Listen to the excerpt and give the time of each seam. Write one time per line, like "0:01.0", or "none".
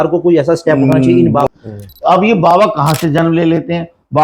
0:01.5